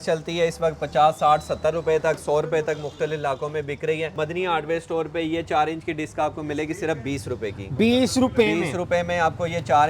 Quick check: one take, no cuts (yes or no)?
no